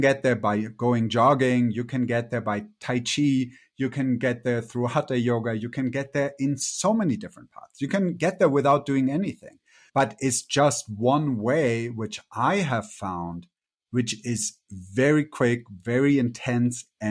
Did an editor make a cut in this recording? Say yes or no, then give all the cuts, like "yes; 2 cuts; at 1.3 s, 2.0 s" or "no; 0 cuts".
no; 0 cuts